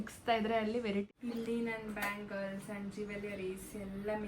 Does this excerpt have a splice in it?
yes; 1 cut; at 1.1 s

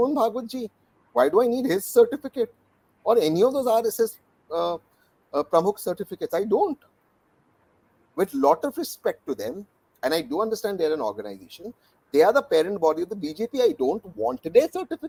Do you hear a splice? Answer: no; 0 cuts

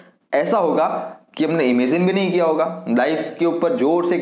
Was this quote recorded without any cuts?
yes; 0 cuts

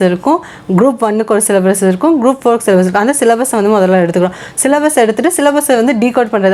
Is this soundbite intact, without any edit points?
yes; 0 cuts

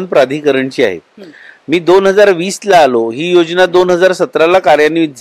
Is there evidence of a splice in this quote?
no; 0 cuts

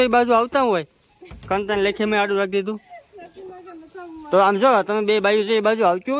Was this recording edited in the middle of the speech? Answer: no; 0 cuts

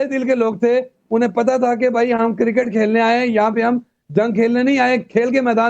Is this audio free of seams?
no; 1 cut; at 2.3 s

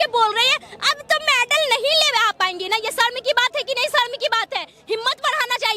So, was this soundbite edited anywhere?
no; 0 cuts

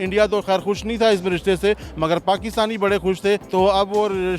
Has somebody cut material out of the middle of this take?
yes; 1 cut; at 3.5 s

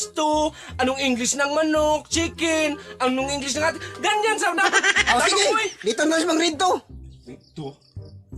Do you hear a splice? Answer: no; 0 cuts

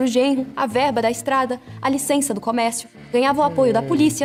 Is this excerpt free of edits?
yes; 0 cuts

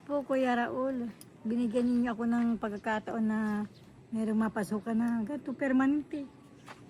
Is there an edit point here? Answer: no; 0 cuts

